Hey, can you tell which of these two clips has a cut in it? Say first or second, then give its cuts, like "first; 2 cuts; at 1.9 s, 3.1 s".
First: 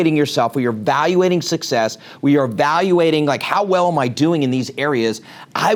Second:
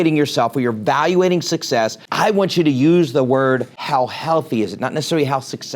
second; 2 cuts; at 2.0 s, 3.7 s